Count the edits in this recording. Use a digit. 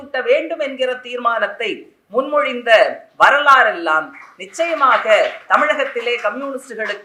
0